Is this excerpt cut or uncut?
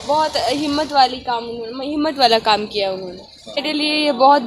cut